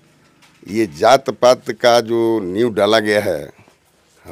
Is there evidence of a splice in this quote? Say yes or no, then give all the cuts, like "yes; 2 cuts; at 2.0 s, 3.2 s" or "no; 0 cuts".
no; 0 cuts